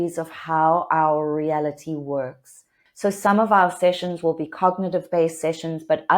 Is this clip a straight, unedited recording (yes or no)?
no